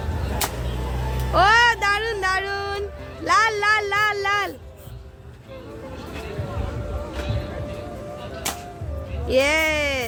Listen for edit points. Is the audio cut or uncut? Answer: uncut